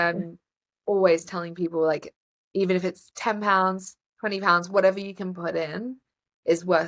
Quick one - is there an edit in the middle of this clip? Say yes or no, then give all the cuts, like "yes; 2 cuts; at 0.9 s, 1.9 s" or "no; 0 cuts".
no; 0 cuts